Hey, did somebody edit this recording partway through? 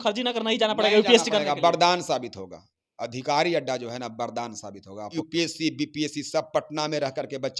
yes; 1 cut; at 5.1 s

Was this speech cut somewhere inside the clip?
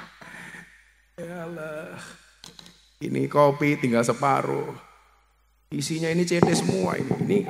no; 0 cuts

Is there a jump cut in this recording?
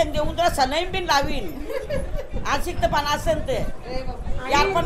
no; 0 cuts

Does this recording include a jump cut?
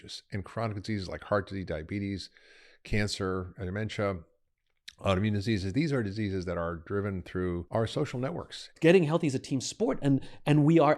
yes; 2 cuts; at 7.6 s, 8.7 s

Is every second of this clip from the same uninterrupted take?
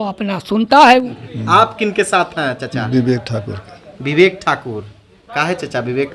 no; 1 cut; at 1.3 s

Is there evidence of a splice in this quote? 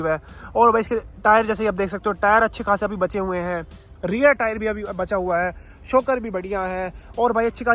no; 0 cuts

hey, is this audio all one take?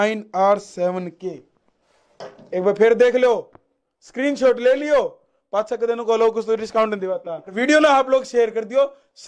no; 1 cut; at 7.5 s

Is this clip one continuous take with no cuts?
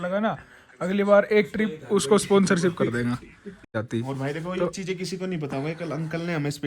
no; 1 cut; at 3.7 s

